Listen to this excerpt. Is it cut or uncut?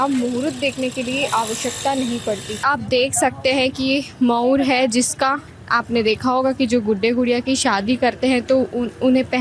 cut